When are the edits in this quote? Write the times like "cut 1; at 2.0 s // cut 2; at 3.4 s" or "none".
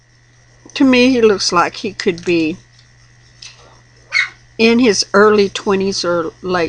cut 1; at 1.3 s